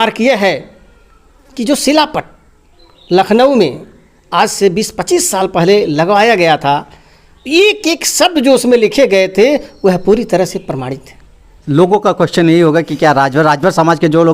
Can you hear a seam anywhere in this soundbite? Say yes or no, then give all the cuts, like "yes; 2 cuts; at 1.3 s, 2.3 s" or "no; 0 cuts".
yes; 1 cut; at 11.5 s